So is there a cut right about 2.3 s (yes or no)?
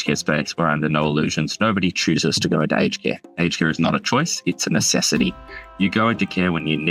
no